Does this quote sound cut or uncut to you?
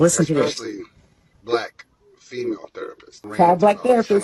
cut